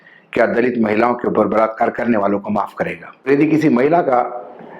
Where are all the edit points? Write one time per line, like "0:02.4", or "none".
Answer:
0:03.3